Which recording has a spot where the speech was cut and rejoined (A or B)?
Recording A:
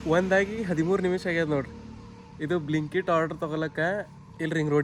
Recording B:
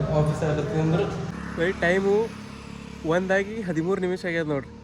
B